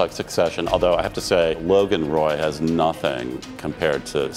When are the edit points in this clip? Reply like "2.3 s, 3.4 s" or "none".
1.6 s

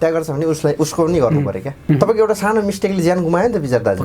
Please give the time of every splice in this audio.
1.8 s

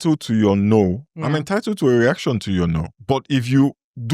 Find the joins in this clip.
2.9 s

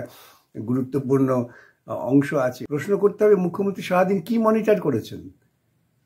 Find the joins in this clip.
2.6 s

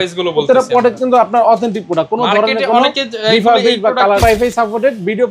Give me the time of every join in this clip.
4.2 s

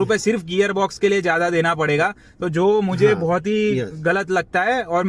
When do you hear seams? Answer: none

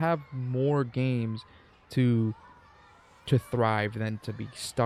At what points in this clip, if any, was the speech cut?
none

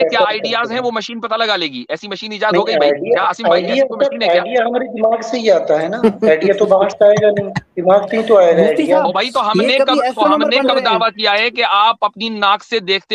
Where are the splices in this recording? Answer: none

